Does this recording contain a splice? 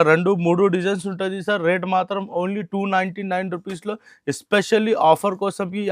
no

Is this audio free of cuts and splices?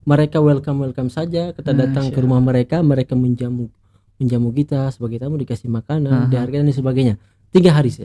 yes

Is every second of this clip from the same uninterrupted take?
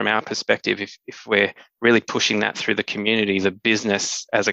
yes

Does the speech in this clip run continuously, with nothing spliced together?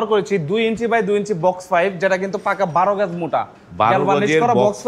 yes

